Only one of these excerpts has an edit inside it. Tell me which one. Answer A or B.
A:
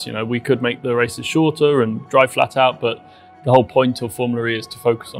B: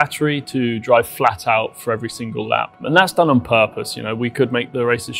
B